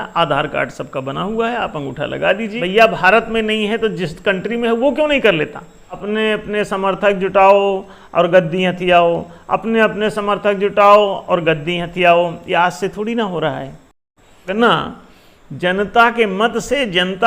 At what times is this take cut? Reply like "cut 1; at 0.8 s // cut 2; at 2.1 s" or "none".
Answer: cut 1; at 2.5 s // cut 2; at 6.0 s // cut 3; at 14.5 s